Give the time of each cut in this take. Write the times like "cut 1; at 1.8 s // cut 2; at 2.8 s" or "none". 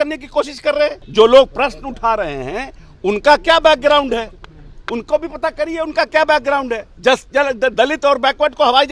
cut 1; at 1.0 s // cut 2; at 6.9 s